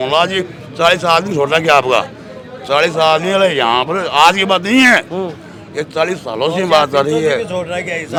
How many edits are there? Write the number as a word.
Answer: zero